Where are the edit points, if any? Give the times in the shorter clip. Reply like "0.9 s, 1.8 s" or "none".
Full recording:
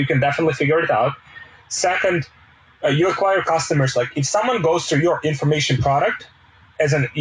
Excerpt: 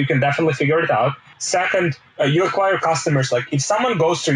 1.7 s